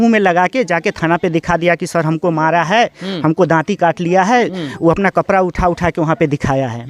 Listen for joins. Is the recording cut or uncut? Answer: uncut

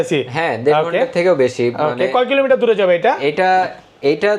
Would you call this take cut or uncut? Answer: uncut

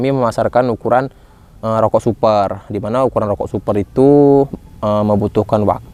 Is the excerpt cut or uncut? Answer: uncut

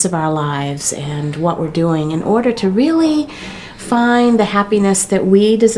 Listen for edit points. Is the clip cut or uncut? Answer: uncut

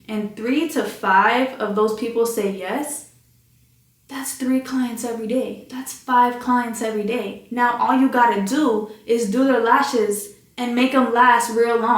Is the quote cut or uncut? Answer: uncut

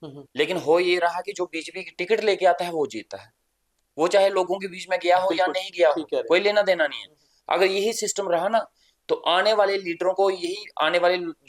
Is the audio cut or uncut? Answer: uncut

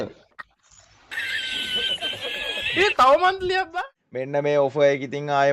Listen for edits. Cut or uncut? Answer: cut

